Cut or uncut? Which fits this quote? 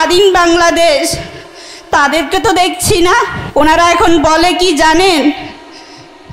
cut